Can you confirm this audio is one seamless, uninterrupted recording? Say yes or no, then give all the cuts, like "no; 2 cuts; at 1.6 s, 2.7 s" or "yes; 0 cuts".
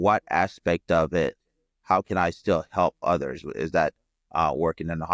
yes; 0 cuts